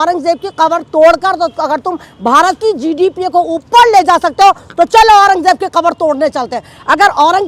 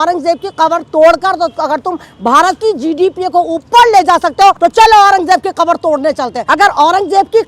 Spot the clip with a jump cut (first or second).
second